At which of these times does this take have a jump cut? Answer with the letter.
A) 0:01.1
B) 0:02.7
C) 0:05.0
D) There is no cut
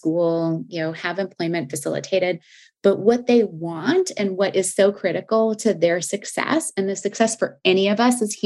D